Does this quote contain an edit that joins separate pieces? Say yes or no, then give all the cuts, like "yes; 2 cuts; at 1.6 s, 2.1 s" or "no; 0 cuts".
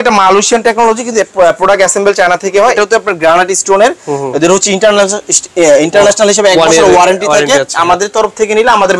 yes; 1 cut; at 2.7 s